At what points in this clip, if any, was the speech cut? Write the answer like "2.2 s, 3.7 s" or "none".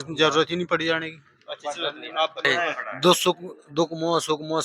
2.4 s